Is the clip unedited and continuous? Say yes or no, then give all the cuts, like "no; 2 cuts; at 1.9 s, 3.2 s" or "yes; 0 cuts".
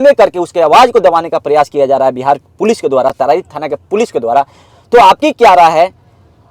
yes; 0 cuts